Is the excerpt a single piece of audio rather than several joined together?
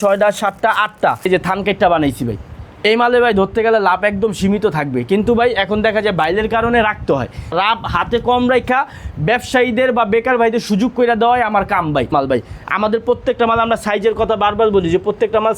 no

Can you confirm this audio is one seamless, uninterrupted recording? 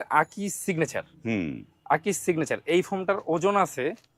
yes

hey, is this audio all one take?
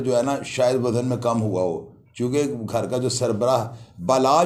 yes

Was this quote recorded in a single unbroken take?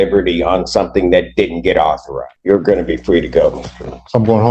yes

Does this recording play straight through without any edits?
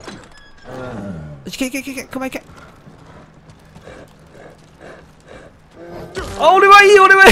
yes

